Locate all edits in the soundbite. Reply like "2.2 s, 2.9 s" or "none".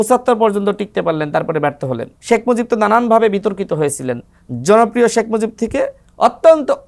2.1 s